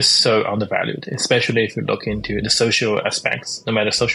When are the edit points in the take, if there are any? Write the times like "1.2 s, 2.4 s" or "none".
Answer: 2.4 s